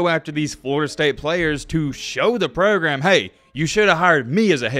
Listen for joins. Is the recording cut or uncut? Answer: uncut